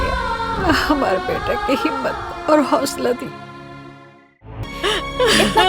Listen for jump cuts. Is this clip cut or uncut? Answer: cut